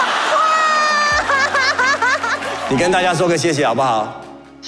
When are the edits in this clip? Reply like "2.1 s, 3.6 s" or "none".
2.6 s